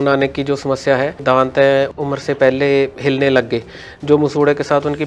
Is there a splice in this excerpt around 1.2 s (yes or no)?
yes